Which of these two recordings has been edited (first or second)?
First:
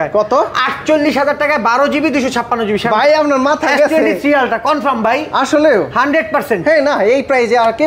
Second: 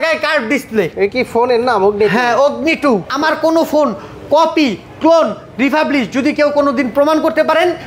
second